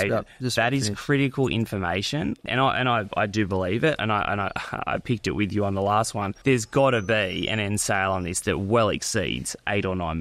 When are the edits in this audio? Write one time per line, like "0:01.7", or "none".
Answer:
0:02.4
0:06.3